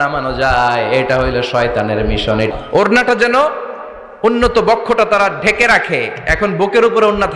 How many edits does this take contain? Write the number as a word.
one